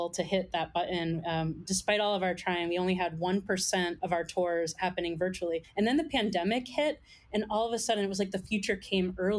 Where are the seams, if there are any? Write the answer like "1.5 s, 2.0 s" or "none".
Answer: none